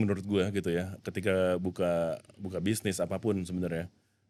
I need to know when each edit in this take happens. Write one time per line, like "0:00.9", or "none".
none

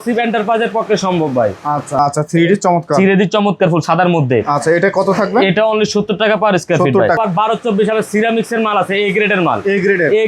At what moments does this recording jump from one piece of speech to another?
0:02.0
0:07.2

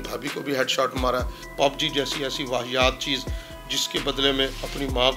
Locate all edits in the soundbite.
0:01.4

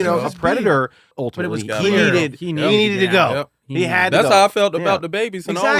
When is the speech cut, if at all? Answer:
0:01.0

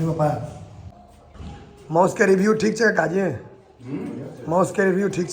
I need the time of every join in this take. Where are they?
0:01.0

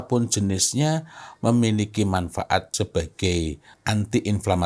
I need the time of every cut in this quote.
0:02.7
0:03.7

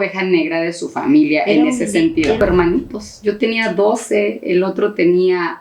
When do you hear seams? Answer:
0:02.4

